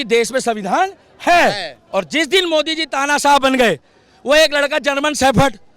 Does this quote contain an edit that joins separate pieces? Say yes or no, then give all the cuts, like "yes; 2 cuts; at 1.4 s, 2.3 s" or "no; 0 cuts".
yes; 1 cut; at 1.7 s